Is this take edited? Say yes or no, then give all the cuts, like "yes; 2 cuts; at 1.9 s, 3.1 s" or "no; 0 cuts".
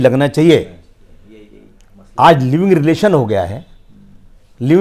no; 0 cuts